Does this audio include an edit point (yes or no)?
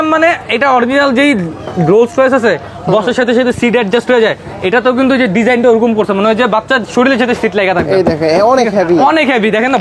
no